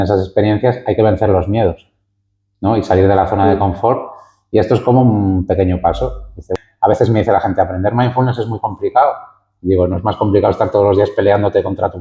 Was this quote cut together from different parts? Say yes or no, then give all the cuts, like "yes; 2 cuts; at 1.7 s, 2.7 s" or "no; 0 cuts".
yes; 1 cut; at 6.5 s